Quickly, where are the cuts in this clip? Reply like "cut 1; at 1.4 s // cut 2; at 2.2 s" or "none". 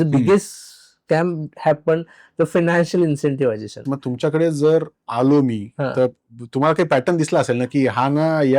cut 1; at 3.9 s